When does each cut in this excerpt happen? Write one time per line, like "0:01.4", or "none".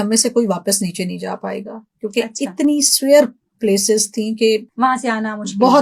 0:04.7